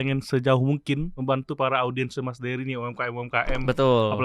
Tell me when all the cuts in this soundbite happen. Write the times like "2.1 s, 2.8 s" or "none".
1.1 s